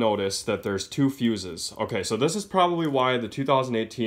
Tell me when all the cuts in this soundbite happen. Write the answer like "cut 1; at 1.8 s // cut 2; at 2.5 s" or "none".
none